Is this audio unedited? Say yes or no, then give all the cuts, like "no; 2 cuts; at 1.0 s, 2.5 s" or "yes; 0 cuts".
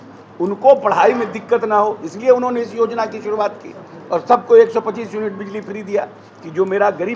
yes; 0 cuts